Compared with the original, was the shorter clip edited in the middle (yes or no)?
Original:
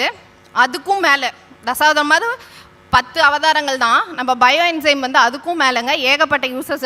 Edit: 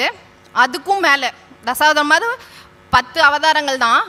no